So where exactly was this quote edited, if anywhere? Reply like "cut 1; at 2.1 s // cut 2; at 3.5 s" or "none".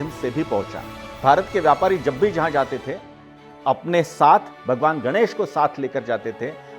cut 1; at 1.2 s // cut 2; at 4.5 s